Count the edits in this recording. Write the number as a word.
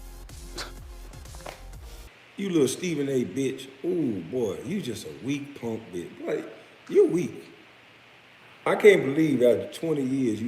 one